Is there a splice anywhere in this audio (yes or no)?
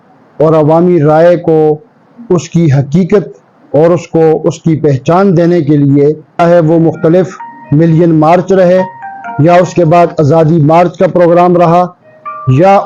yes